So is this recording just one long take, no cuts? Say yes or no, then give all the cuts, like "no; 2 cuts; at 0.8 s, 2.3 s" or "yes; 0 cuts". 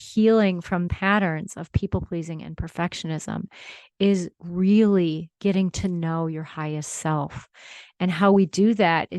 no; 1 cut; at 0.9 s